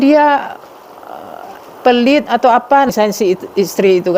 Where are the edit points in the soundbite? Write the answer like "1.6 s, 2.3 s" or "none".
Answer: 2.9 s